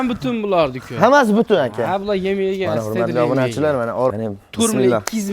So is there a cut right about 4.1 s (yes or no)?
yes